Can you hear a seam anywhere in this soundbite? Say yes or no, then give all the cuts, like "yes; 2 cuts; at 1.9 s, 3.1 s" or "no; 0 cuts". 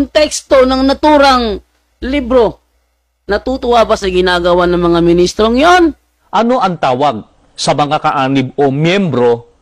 yes; 1 cut; at 6.1 s